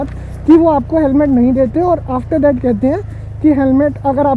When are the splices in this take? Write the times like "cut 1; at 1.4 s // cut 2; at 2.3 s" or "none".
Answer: none